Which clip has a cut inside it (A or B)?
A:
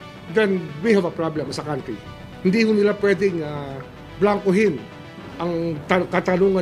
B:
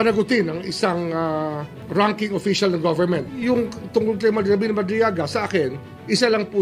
B